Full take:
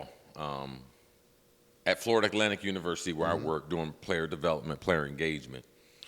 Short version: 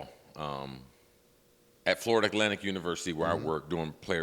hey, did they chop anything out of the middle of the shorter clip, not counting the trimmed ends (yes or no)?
no